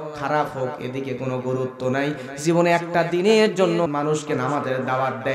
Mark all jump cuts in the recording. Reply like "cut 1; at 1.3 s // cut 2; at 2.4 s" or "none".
cut 1; at 3.9 s